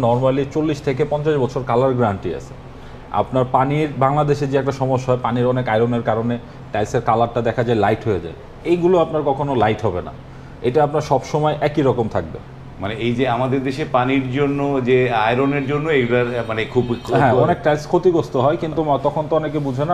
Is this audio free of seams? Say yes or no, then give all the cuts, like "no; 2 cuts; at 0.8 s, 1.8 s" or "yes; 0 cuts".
yes; 0 cuts